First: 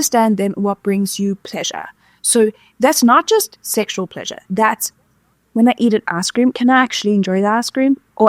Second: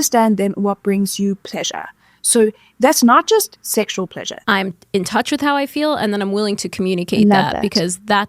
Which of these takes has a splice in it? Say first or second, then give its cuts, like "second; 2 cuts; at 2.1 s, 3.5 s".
second; 1 cut; at 4.3 s